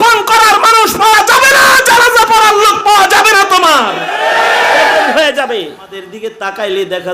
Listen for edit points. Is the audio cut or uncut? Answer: cut